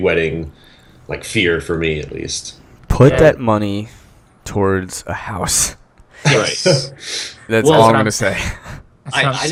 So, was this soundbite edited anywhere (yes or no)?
no